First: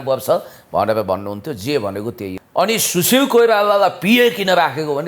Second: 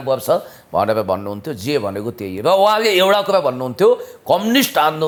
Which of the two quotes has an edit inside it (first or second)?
first